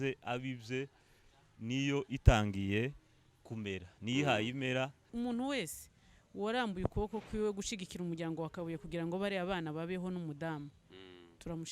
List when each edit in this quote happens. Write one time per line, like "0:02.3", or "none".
0:05.0